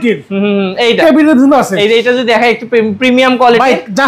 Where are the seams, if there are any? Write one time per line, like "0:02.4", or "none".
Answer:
none